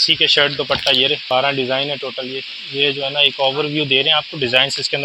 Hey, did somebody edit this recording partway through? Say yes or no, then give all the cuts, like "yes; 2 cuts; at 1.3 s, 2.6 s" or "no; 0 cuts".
yes; 1 cut; at 1.2 s